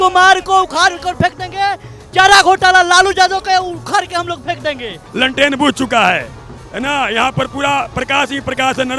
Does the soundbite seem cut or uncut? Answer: cut